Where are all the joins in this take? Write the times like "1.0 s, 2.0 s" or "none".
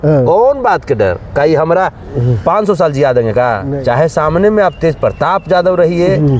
3.7 s